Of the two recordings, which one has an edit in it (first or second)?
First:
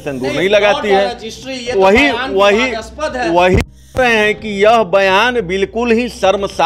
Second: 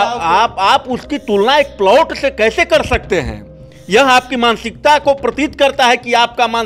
first